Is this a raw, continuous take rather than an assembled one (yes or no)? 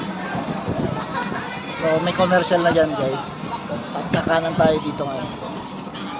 yes